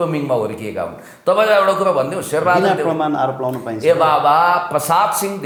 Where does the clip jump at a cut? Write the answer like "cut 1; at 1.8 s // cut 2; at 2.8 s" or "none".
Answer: none